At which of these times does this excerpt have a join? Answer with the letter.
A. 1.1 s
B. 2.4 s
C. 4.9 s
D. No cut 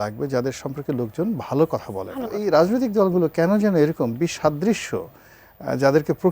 B